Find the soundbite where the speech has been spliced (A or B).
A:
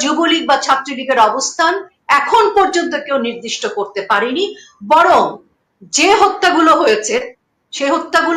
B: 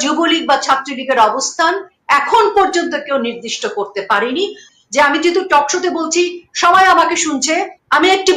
B